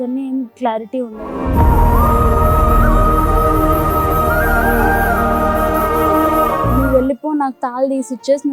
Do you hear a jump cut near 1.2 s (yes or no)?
yes